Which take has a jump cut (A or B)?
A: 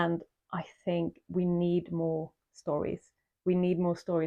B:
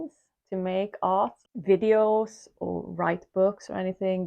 B